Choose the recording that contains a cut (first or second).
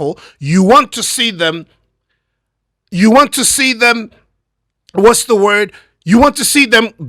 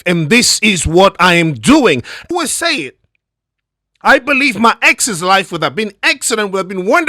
second